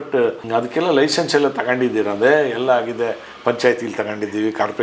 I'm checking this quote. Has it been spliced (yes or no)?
no